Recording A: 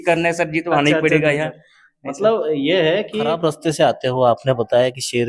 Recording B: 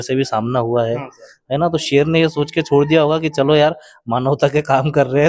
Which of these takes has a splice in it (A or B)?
A